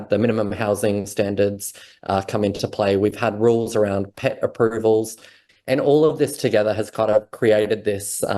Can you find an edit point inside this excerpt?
yes; 1 cut; at 5.4 s

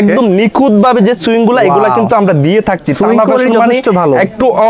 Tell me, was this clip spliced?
no; 0 cuts

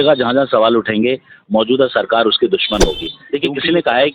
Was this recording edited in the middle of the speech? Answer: yes; 1 cut; at 3.1 s

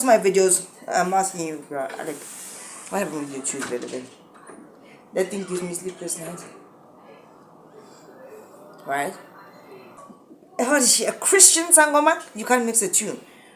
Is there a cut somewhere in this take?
yes; 1 cut; at 10.0 s

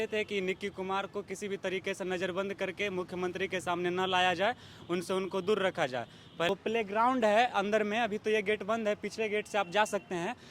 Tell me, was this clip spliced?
yes; 1 cut; at 6.5 s

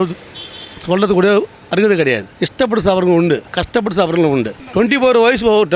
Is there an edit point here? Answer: yes; 3 cuts; at 2.3 s, 3.5 s, 4.6 s

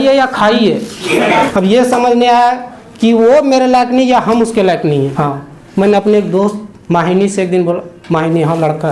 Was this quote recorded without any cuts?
no; 2 cuts; at 1.5 s, 5.1 s

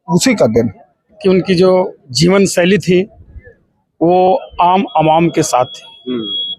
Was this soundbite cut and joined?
yes; 1 cut; at 1.2 s

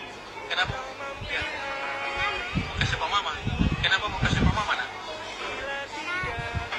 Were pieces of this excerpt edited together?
no; 0 cuts

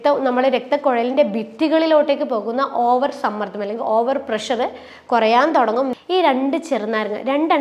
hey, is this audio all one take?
no; 1 cut; at 5.9 s

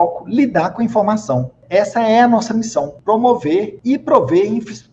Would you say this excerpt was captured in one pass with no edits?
no; 3 cuts; at 1.5 s, 2.9 s, 3.7 s

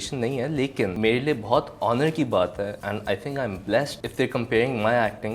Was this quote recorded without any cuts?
no; 3 cuts; at 0.9 s, 2.8 s, 4.0 s

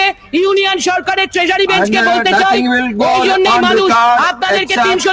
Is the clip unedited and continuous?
yes; 0 cuts

